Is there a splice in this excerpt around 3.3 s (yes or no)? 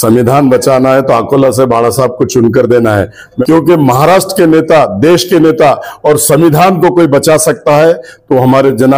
yes